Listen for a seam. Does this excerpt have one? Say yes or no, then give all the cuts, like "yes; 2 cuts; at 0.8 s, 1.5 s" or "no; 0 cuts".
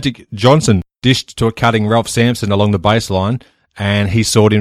yes; 1 cut; at 0.9 s